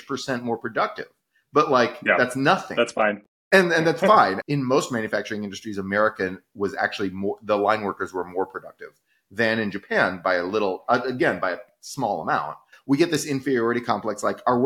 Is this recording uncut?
no; 2 cuts; at 4.4 s, 12.7 s

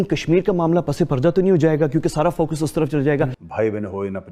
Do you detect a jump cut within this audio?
yes; 1 cut; at 3.4 s

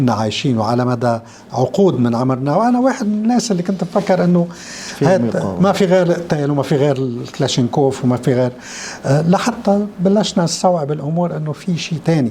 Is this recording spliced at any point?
no; 0 cuts

